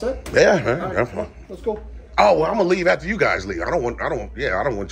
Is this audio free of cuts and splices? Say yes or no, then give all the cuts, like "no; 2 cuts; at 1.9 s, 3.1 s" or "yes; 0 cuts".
yes; 0 cuts